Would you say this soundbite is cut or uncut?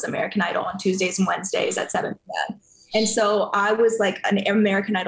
uncut